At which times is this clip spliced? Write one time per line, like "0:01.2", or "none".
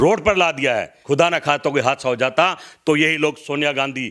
0:00.9